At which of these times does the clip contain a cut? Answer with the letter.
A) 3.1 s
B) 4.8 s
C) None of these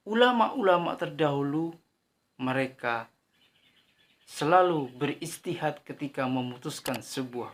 C